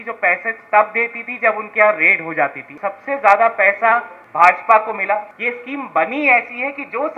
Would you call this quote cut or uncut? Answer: cut